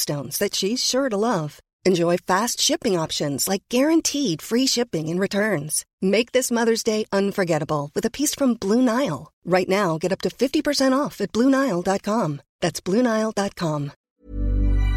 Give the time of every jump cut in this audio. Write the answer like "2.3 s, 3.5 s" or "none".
13.9 s